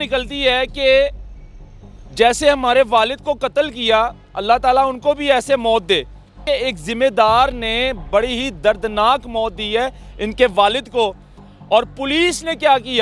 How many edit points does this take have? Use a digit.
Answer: 1